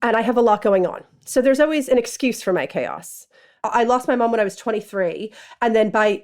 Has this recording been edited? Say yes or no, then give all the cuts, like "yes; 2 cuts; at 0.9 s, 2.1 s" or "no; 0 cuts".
yes; 1 cut; at 3.6 s